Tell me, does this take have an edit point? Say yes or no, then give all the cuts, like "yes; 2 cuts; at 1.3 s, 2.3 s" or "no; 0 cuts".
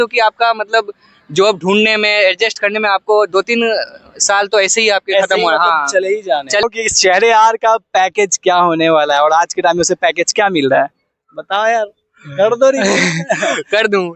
no; 0 cuts